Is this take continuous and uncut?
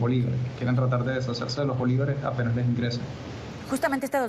yes; 0 cuts

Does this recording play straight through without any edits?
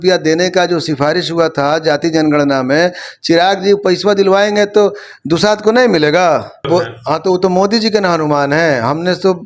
no; 1 cut; at 6.7 s

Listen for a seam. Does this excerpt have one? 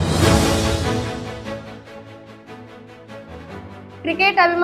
no; 0 cuts

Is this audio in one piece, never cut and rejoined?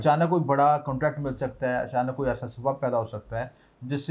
yes; 0 cuts

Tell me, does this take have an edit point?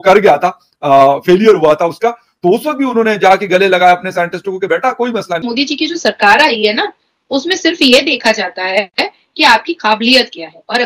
yes; 1 cut; at 5.4 s

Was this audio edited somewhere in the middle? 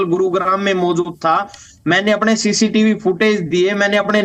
no; 0 cuts

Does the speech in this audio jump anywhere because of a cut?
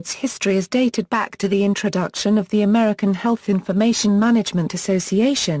no; 0 cuts

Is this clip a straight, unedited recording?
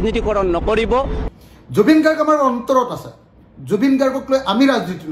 no; 1 cut; at 1.2 s

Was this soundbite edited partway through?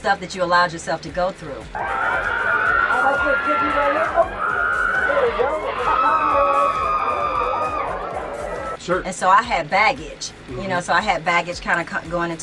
no; 0 cuts

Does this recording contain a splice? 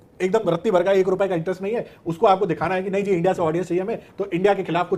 no; 0 cuts

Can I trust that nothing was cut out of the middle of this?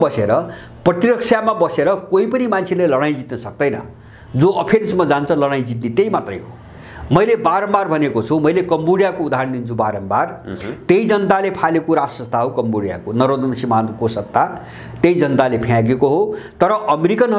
yes; 0 cuts

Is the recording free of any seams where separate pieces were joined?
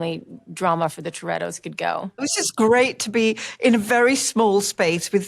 no; 1 cut; at 2.3 s

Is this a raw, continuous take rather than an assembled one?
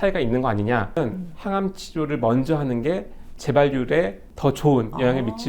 no; 1 cut; at 0.9 s

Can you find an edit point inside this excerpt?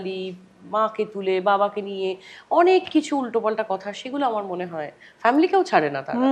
no; 0 cuts

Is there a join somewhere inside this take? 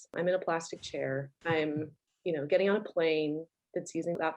yes; 2 cuts; at 1.3 s, 2.0 s

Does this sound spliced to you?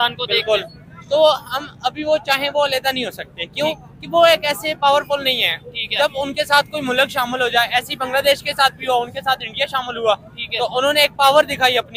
no; 0 cuts

